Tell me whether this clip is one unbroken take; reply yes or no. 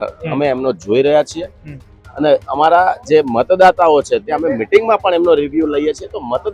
yes